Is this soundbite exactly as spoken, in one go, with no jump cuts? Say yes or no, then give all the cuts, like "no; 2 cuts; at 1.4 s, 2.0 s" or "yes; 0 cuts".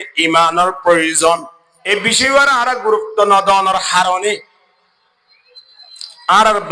no; 1 cut; at 1.8 s